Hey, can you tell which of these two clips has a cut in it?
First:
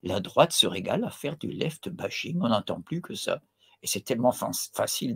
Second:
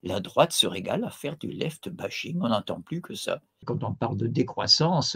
second; 1 cut; at 3.6 s

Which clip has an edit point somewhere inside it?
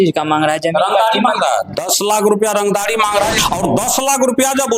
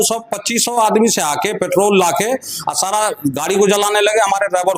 first; 1 cut; at 3.4 s

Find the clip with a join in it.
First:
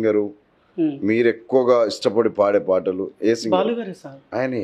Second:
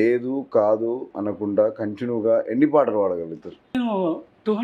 second; 2 cuts; at 1.1 s, 3.7 s

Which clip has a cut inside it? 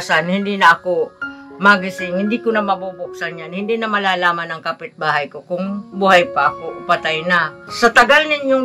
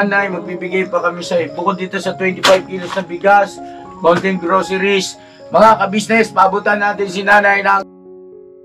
first; 1 cut; at 7.6 s

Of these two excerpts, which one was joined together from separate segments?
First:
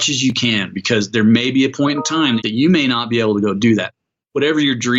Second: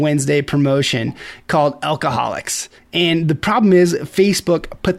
first; 2 cuts; at 2.4 s, 4.0 s

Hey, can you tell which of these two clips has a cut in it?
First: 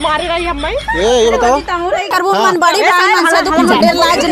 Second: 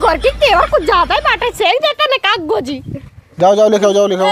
first; 1 cut; at 2.1 s

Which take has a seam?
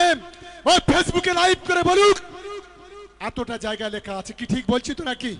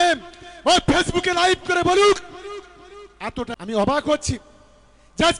second; 1 cut; at 3.5 s

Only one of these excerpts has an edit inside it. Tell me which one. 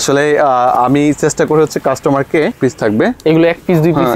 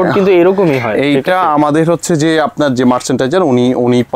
first; 1 cut; at 2.5 s

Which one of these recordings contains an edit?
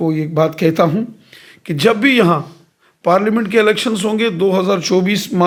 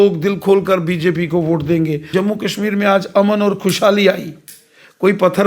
second; 1 cut; at 2.1 s

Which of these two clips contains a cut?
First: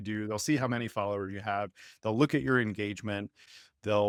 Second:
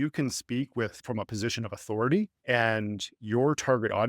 second; 2 cuts; at 1.0 s, 2.4 s

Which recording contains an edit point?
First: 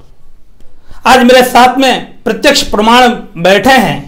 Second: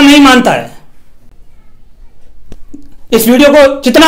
second; 1 cut; at 1.4 s

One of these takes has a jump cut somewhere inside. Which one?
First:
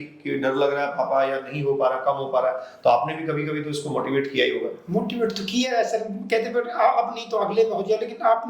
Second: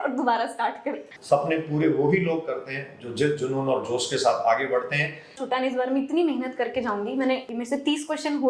second; 3 cuts; at 1.1 s, 5.4 s, 7.5 s

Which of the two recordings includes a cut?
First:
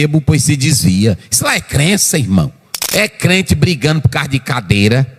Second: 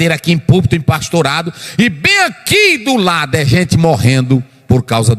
first; 1 cut; at 2.7 s

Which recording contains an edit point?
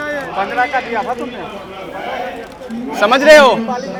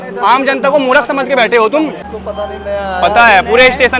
second; 1 cut; at 2.1 s

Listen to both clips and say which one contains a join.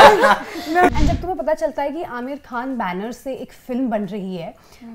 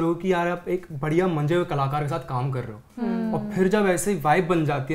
first; 1 cut; at 0.9 s

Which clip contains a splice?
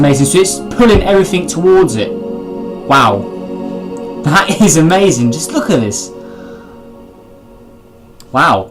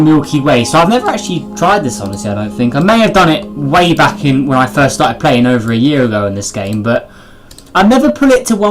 second; 1 cut; at 2.2 s

